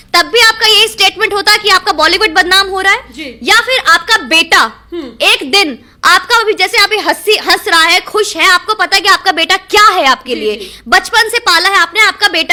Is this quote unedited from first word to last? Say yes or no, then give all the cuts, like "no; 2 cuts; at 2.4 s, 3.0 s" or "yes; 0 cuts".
yes; 0 cuts